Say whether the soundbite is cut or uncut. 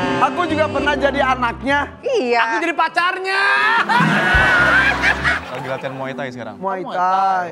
cut